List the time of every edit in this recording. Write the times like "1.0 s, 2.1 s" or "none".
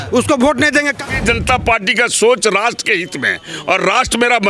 1.0 s